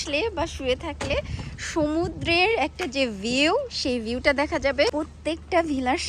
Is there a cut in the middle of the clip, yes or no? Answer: yes